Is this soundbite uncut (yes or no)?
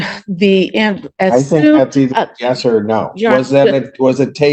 yes